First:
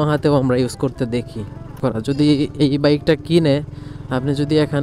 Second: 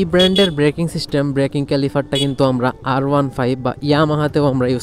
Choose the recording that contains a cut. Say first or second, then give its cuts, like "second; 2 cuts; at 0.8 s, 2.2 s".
first; 1 cut; at 1.7 s